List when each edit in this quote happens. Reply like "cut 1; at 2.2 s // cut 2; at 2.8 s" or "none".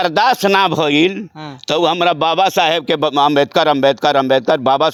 none

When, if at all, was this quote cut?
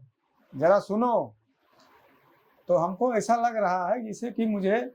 none

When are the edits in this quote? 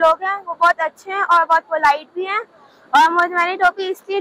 none

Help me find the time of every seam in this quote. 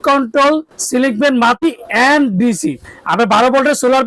cut 1; at 1.6 s

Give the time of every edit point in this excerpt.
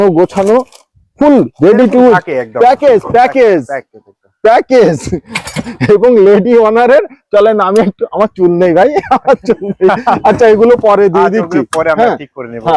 none

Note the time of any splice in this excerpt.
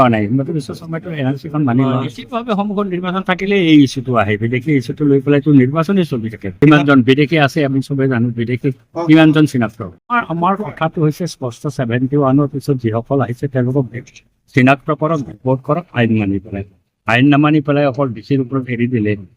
cut 1; at 2.2 s // cut 2; at 6.5 s // cut 3; at 9.8 s

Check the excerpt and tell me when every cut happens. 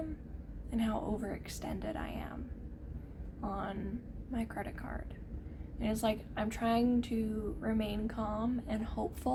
none

